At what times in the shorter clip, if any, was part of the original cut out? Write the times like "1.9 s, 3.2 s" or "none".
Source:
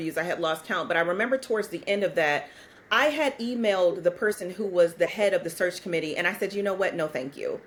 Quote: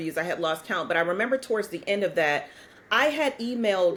none